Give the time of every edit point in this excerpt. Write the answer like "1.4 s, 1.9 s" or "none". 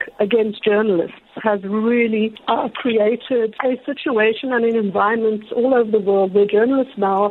2.4 s, 3.5 s

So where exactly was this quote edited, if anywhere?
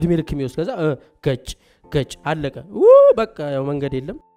none

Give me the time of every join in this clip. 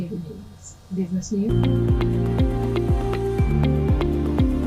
1.5 s

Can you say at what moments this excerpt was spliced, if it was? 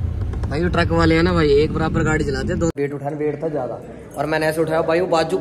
2.7 s

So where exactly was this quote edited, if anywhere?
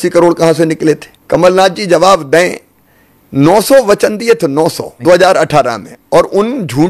1.1 s, 4.9 s

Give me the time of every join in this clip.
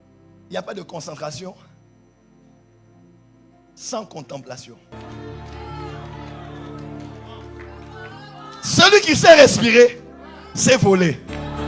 4.9 s

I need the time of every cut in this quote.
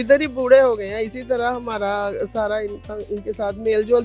none

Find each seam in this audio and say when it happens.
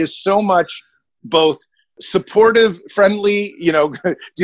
none

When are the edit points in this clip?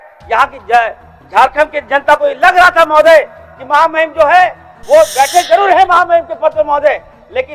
none

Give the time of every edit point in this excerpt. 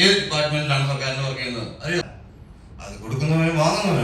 2.0 s

